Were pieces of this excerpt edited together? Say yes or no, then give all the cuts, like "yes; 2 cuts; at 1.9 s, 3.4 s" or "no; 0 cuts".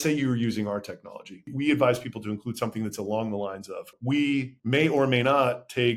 yes; 3 cuts; at 1.4 s, 3.9 s, 4.6 s